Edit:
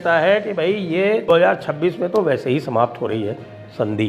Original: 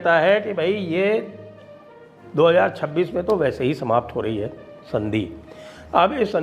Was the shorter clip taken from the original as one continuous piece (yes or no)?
no